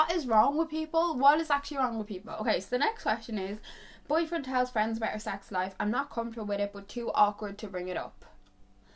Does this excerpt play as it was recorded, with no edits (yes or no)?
yes